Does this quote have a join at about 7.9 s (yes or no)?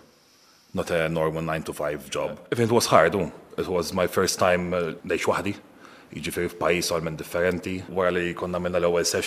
yes